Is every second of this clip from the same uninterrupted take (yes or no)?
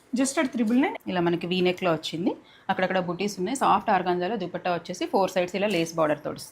no